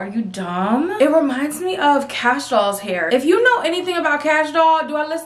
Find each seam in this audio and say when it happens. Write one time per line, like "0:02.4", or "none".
0:00.9